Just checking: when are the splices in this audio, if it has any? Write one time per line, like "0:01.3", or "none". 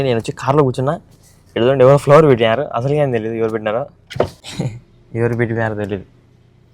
0:04.4